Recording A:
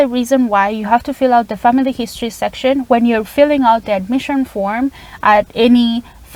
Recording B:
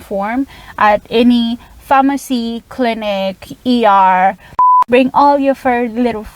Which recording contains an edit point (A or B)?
B